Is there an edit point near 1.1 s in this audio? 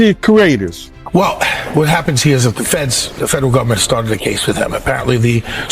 yes; 1 cut; at 1.1 s

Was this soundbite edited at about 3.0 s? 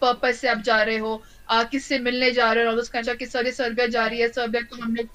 yes; 1 cut; at 3.0 s

